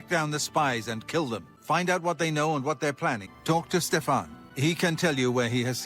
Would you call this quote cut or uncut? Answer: cut